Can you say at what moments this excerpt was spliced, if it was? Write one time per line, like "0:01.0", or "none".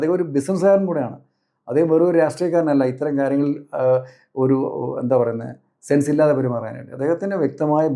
none